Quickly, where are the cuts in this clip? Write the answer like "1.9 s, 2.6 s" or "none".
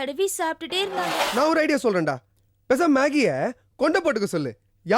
1.2 s